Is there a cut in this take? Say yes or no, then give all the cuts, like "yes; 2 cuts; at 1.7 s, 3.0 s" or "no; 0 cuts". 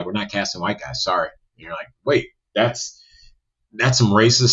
no; 0 cuts